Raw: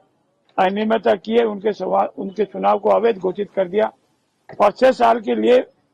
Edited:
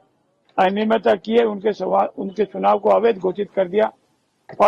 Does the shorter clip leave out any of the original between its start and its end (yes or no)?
no